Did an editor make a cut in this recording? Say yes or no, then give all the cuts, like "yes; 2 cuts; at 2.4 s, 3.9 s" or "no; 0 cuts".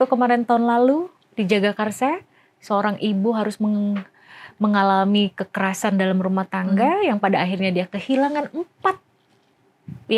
no; 0 cuts